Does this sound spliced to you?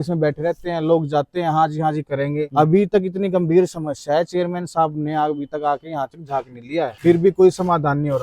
yes; 1 cut; at 7.0 s

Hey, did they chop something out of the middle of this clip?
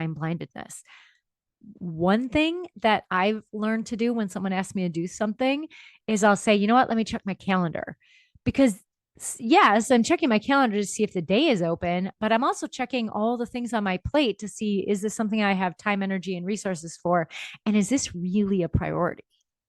no; 0 cuts

